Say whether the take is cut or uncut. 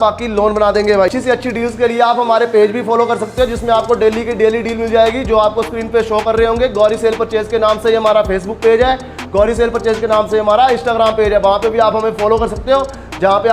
cut